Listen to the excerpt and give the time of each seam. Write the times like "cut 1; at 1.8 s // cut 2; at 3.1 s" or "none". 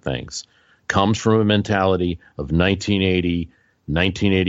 none